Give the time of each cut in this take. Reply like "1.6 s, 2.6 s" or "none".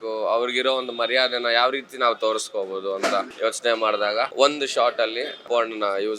3.3 s, 4.3 s, 5.4 s